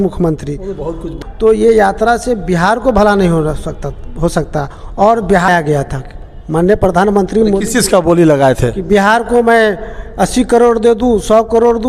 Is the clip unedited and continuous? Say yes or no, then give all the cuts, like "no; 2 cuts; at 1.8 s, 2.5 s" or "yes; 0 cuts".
no; 2 cuts; at 1.1 s, 5.5 s